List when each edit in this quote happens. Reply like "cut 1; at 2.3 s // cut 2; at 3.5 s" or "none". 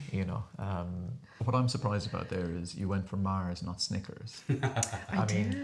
cut 1; at 1.4 s